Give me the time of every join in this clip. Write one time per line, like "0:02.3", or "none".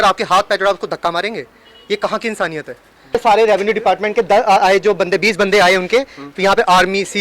0:03.2